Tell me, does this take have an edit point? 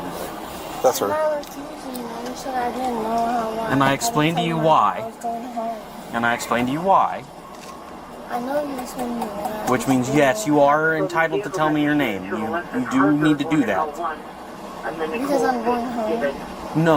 no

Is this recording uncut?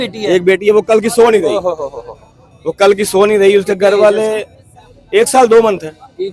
yes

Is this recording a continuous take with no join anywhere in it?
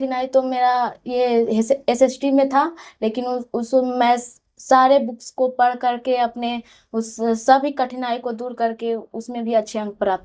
yes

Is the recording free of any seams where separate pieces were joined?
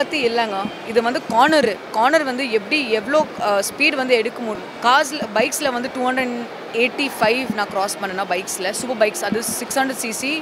no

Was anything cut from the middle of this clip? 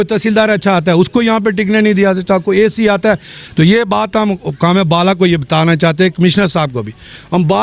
no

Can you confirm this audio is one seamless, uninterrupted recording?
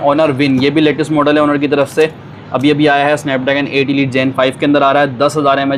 yes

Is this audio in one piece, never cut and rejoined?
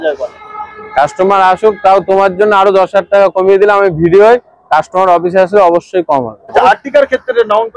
no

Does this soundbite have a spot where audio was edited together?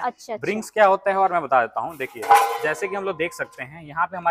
no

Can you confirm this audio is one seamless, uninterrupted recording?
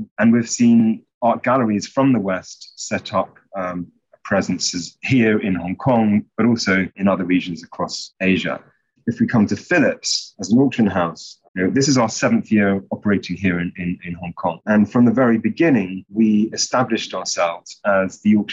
no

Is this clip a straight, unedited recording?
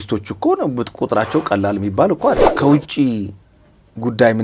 no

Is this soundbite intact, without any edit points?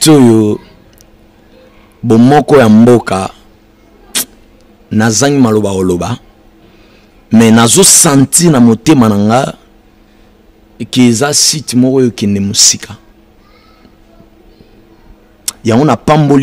yes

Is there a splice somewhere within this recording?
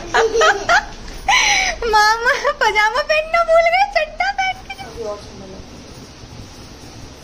yes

